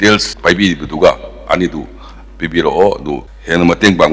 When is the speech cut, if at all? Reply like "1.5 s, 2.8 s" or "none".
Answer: none